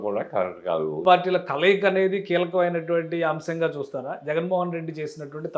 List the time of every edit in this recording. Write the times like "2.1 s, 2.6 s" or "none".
1.0 s